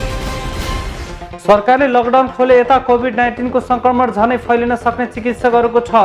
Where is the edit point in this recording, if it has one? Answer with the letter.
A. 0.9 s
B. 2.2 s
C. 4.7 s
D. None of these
A